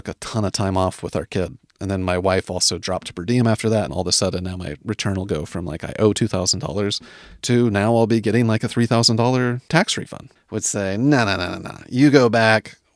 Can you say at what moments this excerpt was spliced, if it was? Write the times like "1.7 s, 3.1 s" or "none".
3.9 s, 10.0 s